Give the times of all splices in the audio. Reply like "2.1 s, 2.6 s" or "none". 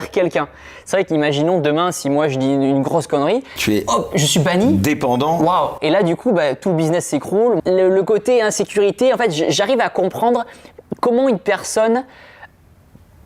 7.6 s